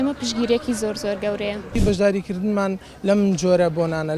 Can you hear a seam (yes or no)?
yes